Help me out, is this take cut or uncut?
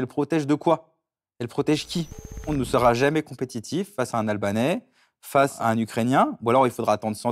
cut